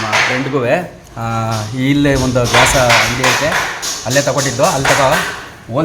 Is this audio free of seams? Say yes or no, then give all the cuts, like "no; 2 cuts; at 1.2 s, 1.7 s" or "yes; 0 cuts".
yes; 0 cuts